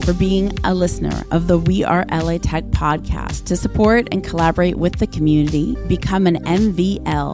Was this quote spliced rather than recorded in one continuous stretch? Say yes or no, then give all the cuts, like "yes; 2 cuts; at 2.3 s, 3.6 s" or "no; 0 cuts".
no; 0 cuts